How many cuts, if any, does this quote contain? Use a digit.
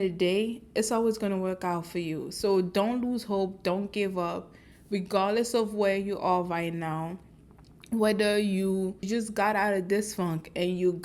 1